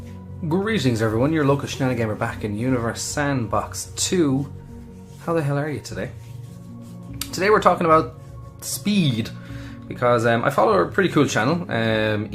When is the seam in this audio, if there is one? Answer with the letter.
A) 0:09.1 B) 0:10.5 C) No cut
A